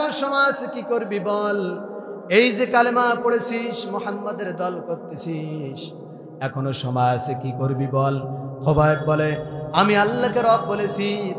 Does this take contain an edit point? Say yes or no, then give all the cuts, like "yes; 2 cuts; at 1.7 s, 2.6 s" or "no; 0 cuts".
no; 0 cuts